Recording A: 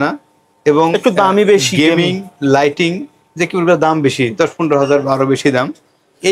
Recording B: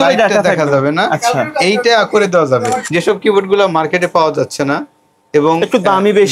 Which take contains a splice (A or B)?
B